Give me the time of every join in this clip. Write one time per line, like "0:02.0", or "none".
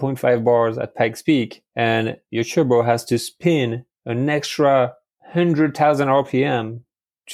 0:02.2